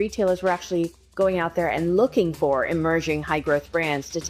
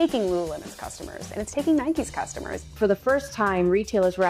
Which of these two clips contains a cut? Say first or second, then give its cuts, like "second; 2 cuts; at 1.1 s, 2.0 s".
second; 1 cut; at 2.8 s